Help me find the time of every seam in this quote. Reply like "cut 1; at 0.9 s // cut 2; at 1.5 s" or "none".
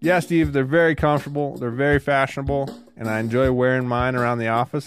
none